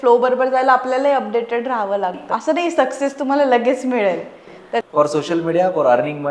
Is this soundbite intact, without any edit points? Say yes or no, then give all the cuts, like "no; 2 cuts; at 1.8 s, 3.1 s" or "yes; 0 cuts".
no; 2 cuts; at 2.2 s, 4.8 s